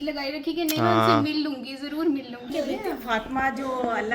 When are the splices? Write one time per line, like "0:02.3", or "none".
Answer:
0:02.5